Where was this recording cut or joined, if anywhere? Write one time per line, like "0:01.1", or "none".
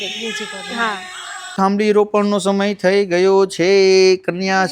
0:01.5